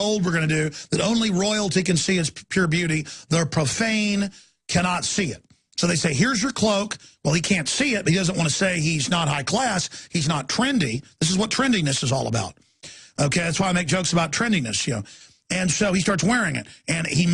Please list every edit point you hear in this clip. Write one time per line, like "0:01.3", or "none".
0:03.0